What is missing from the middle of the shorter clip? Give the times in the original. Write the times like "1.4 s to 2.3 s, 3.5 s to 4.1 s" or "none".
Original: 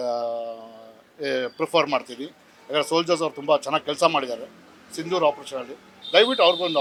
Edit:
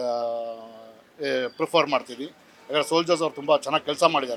none